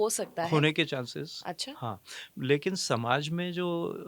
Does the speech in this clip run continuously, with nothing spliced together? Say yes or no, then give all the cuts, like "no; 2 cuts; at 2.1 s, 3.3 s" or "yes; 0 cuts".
yes; 0 cuts